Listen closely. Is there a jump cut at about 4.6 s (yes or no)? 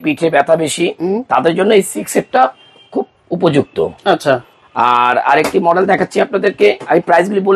no